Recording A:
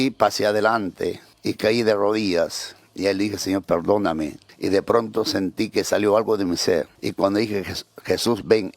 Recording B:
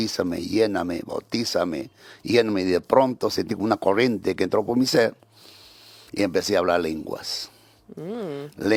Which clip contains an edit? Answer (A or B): A